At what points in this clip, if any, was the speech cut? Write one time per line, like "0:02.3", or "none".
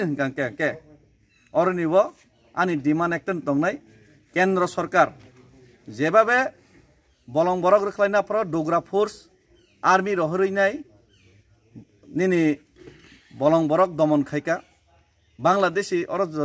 none